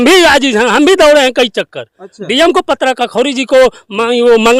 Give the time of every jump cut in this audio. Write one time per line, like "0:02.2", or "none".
none